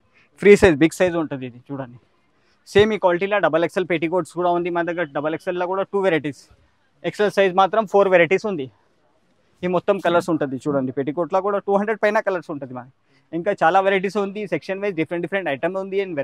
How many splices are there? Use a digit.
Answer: 0